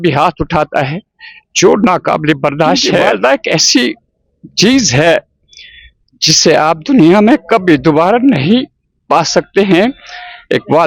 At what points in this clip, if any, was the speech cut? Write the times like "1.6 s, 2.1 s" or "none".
3.1 s